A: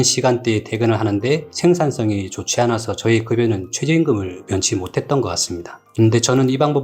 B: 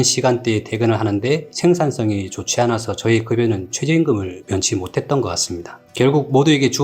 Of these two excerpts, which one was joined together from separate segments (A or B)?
A